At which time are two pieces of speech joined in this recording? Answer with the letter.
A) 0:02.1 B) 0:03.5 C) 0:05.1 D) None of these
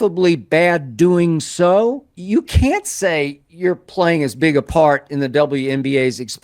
A